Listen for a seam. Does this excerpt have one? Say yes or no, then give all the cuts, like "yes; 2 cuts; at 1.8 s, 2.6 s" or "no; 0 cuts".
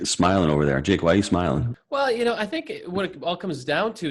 yes; 1 cut; at 1.8 s